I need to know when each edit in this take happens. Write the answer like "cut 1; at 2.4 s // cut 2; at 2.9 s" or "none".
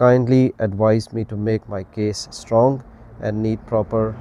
none